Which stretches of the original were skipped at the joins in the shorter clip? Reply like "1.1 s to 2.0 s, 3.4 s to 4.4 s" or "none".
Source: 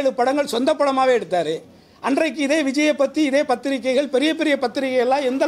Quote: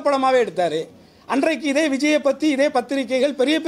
none